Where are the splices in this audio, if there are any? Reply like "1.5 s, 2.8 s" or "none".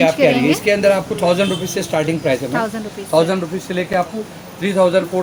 none